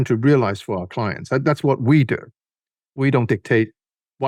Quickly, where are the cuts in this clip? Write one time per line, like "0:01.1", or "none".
none